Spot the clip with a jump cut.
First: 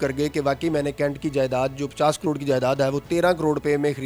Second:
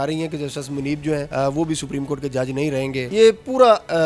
second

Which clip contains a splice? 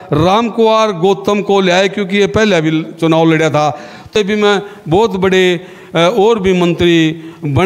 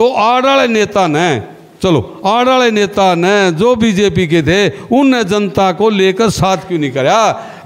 first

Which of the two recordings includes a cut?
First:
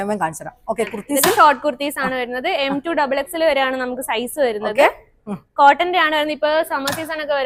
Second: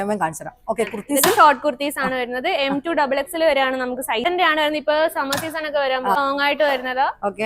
second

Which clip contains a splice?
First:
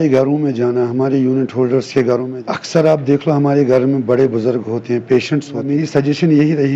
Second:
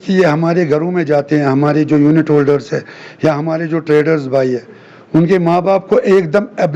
first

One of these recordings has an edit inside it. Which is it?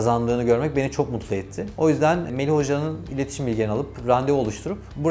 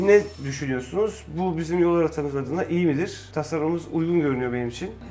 first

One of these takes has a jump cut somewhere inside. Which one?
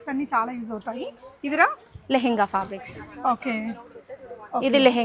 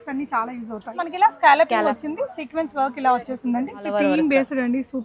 second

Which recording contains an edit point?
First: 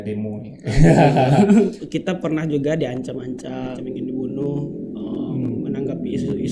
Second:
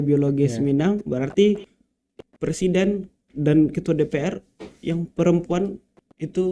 first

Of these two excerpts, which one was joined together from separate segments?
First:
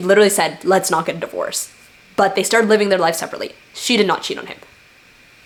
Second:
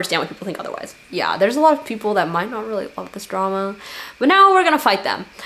second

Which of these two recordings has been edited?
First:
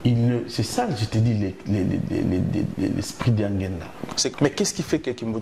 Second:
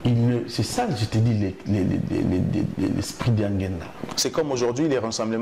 first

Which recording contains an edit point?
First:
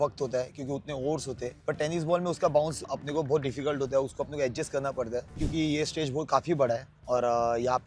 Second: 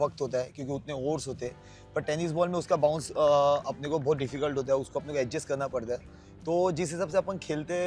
first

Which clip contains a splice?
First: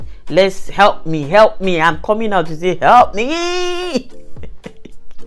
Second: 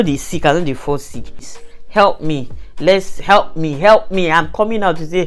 second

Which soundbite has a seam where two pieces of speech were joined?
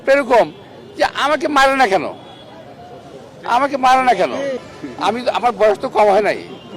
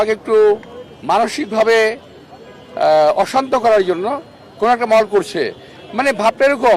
first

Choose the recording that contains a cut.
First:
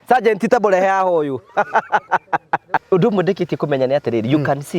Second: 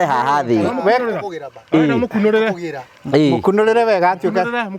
first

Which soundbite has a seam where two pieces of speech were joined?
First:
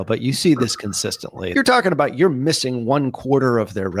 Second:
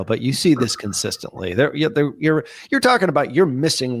first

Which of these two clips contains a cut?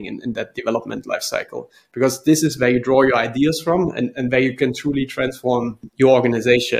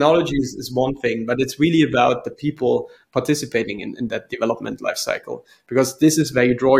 first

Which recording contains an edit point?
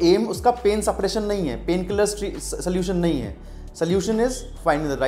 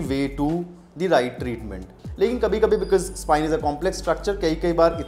second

